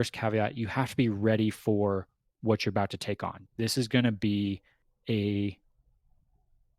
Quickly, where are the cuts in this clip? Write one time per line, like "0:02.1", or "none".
0:03.4